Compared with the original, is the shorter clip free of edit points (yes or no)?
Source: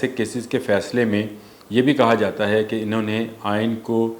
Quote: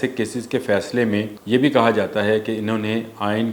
no